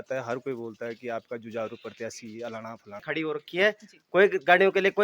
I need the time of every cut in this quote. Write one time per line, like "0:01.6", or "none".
0:03.0